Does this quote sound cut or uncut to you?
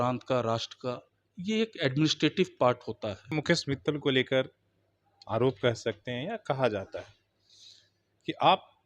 cut